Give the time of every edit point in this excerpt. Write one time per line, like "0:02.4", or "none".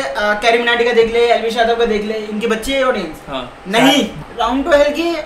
0:04.2